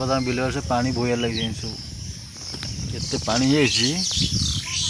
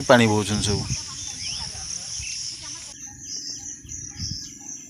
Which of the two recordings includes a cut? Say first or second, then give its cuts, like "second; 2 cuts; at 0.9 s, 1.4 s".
second; 1 cut; at 2.9 s